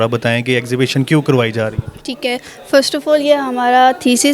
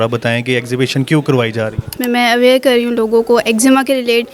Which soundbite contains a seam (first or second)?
second